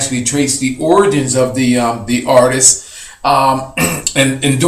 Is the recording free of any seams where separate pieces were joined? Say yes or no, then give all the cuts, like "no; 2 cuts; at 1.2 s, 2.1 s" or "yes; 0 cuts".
yes; 0 cuts